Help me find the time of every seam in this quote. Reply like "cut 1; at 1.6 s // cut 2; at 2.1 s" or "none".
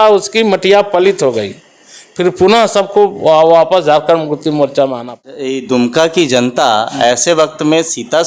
cut 1; at 5.4 s